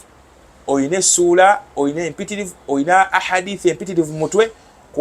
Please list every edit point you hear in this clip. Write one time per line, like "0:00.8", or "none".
none